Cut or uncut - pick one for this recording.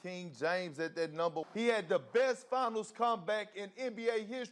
cut